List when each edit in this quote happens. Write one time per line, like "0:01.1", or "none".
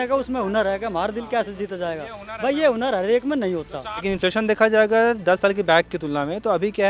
0:04.1

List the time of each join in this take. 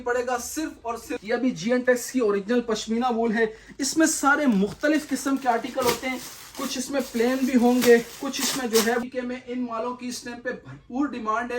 0:01.2
0:09.0

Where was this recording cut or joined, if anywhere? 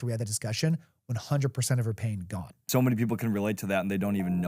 0:02.6

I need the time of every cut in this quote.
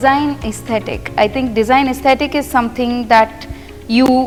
none

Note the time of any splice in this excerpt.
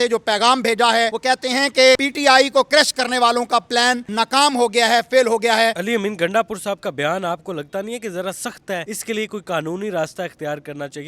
0:01.2
0:02.0
0:04.1
0:05.8
0:08.9

